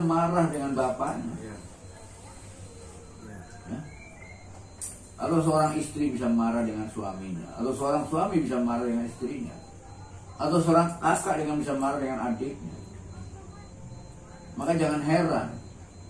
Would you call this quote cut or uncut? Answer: uncut